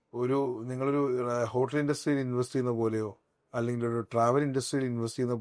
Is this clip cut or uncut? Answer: uncut